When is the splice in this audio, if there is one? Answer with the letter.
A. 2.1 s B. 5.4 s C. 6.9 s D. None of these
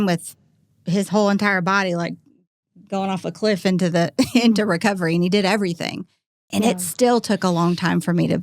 D